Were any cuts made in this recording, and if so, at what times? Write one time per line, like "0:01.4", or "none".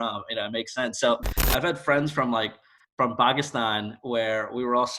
0:01.3